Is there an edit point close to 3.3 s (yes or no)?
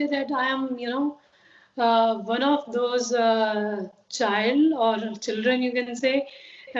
no